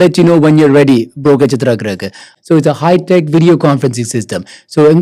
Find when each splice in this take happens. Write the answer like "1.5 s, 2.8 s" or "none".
2.3 s